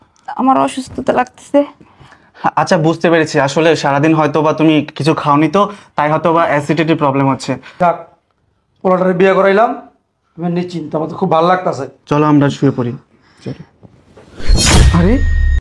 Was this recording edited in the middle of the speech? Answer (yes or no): yes